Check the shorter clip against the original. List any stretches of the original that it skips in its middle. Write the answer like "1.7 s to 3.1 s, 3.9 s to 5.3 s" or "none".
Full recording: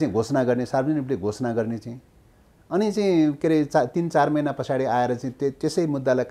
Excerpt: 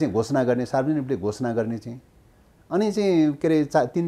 none